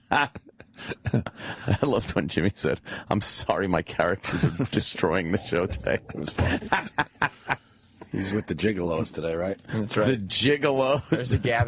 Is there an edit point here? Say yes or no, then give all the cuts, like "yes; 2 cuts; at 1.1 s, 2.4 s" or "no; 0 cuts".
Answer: yes; 1 cut; at 3.2 s